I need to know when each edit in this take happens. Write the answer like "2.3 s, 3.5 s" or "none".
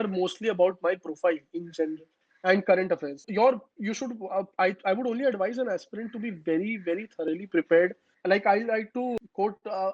3.3 s, 8.1 s, 9.2 s